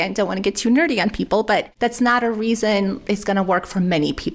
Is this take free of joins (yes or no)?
no